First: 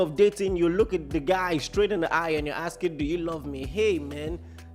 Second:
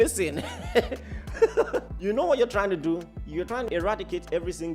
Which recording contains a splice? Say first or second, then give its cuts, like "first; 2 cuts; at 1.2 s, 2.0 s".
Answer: second; 2 cuts; at 1.9 s, 3.6 s